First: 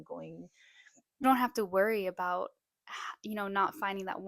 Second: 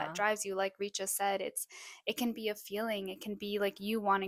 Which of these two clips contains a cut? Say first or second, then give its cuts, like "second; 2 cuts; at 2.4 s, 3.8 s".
first; 1 cut; at 1.2 s